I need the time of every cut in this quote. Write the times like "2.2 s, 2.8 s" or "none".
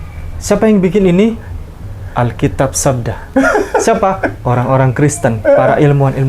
none